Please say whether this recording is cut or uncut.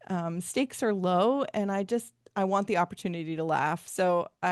uncut